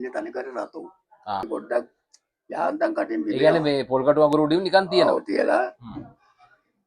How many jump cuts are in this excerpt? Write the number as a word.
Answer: one